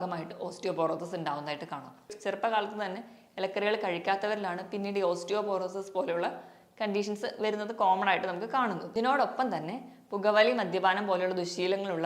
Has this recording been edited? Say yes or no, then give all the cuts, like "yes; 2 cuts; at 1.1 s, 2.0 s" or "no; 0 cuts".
yes; 2 cuts; at 2.1 s, 8.8 s